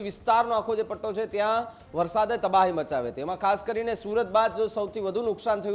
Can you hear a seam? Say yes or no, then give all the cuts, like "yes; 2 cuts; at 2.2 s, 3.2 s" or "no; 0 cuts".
no; 0 cuts